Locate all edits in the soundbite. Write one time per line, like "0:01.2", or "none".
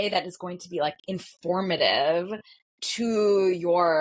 none